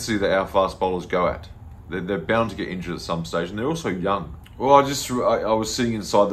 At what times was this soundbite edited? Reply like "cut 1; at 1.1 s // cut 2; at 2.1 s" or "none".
cut 1; at 4.4 s